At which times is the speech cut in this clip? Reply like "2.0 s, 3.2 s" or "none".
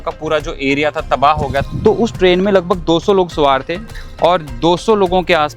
1.7 s, 3.9 s